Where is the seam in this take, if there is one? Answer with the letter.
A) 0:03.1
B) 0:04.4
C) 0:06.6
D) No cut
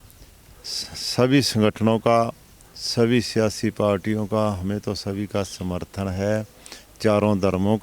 D